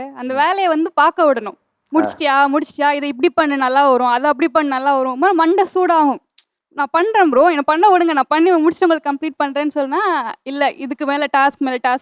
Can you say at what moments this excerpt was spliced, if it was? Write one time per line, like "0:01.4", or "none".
none